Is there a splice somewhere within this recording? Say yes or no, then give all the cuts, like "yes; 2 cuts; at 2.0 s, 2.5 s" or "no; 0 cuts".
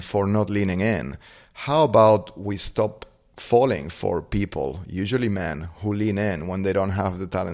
no; 0 cuts